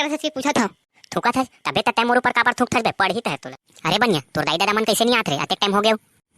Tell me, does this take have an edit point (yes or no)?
yes